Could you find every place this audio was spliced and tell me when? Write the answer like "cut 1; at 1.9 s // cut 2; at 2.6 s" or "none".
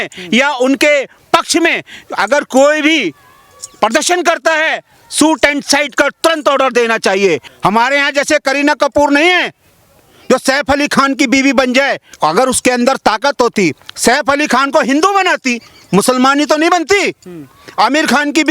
cut 1; at 7.5 s // cut 2; at 12.1 s